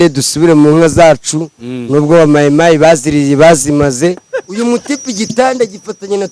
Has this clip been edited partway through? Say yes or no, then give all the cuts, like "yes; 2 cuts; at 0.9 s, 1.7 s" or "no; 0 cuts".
yes; 1 cut; at 4.3 s